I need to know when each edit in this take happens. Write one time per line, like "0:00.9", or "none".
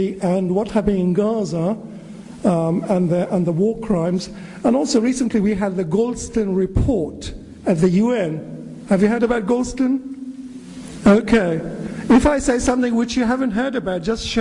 0:07.5